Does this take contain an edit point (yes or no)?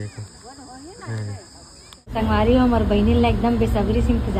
yes